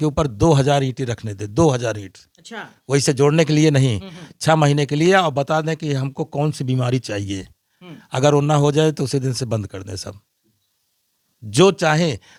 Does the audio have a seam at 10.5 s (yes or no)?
no